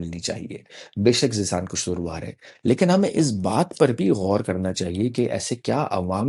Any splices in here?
no; 0 cuts

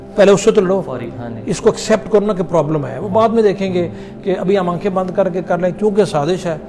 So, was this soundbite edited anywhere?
no; 0 cuts

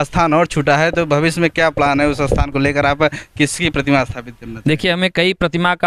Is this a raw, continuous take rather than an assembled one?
yes; 0 cuts

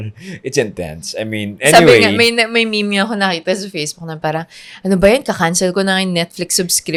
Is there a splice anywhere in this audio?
no; 0 cuts

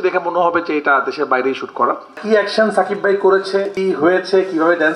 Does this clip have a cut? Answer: yes; 2 cuts; at 2.2 s, 3.7 s

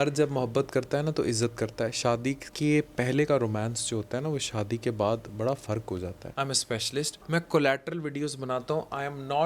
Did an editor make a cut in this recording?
yes; 3 cuts; at 2.5 s, 6.2 s, 7.2 s

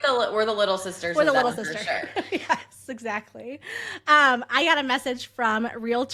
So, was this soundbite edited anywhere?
no; 0 cuts

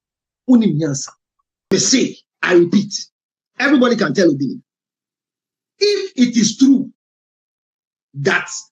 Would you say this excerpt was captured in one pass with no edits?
no; 1 cut; at 1.7 s

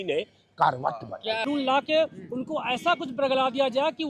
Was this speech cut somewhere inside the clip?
yes; 1 cut; at 1.4 s

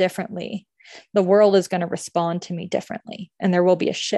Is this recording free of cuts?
yes; 0 cuts

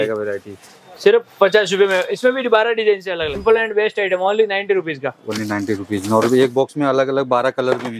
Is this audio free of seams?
no; 1 cut; at 3.4 s

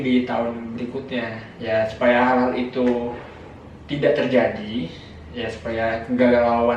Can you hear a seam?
no; 0 cuts

